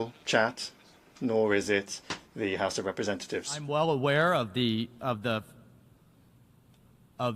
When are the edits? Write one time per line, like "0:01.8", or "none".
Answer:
0:03.6